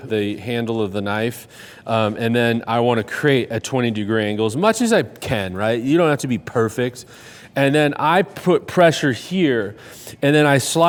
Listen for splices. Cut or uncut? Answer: uncut